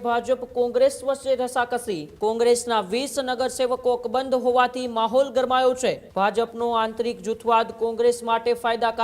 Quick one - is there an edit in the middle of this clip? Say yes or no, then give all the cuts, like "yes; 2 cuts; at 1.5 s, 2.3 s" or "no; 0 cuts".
yes; 2 cuts; at 2.0 s, 6.0 s